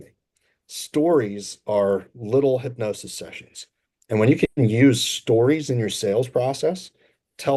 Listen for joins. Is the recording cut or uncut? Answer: uncut